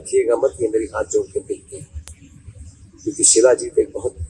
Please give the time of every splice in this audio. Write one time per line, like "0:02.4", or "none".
none